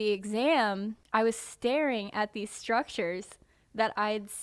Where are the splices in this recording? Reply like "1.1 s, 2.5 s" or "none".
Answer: 0.9 s